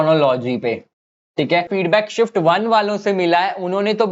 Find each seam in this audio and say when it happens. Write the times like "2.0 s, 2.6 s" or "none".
1.7 s